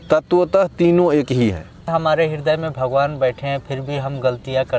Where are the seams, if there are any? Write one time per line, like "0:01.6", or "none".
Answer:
0:01.7